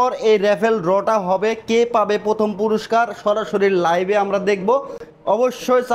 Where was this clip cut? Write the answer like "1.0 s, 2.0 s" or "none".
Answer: none